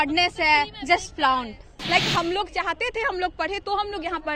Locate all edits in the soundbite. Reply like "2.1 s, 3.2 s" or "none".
1.7 s